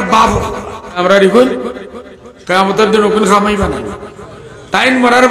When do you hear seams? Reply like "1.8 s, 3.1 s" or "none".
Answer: 1.0 s